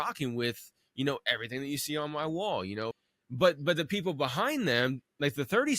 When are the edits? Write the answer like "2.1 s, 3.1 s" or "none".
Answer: 3.1 s

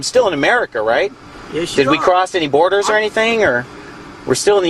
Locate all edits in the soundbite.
none

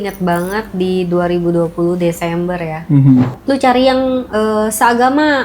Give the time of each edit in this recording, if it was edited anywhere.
3.4 s

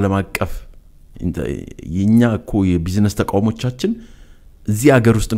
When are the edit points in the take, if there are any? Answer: none

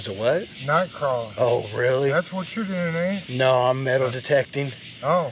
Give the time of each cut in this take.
none

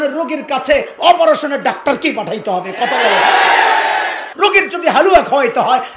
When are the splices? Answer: 4.3 s

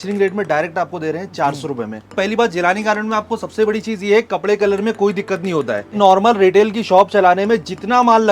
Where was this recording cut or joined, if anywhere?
2.1 s, 5.9 s

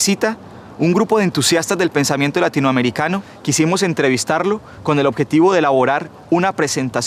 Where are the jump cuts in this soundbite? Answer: none

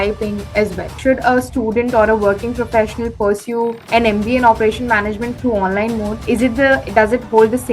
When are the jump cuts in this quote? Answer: 1.0 s, 3.8 s, 6.2 s

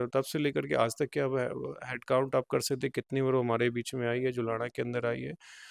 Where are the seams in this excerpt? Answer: none

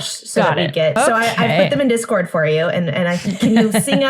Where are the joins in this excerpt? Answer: 1.0 s

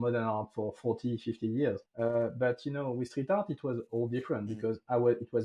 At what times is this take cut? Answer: 1.9 s

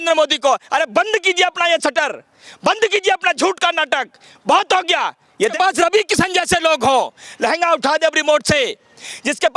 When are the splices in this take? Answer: 5.5 s

